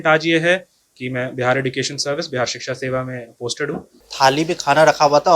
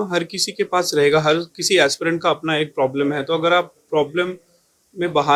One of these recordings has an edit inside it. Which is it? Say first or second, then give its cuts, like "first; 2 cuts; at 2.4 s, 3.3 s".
first; 1 cut; at 4.0 s